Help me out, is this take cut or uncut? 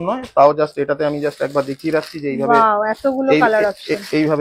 uncut